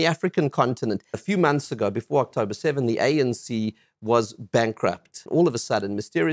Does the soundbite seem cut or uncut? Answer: cut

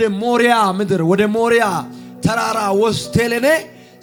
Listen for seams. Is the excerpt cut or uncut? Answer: uncut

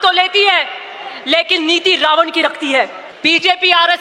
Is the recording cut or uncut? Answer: cut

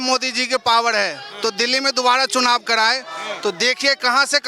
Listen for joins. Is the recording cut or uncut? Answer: uncut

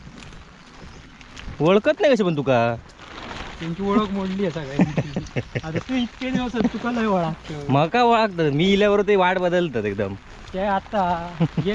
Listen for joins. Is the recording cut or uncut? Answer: uncut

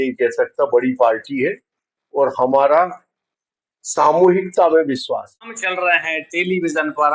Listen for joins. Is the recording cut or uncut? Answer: cut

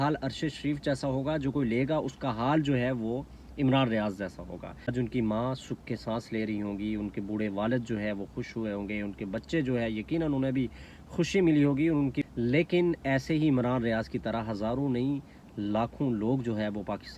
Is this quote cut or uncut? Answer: cut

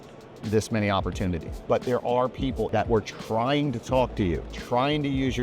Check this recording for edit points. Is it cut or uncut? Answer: cut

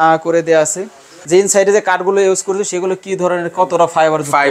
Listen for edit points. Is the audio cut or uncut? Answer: cut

